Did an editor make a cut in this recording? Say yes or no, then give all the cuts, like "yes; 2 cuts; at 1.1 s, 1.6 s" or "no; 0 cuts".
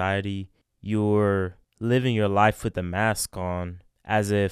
no; 0 cuts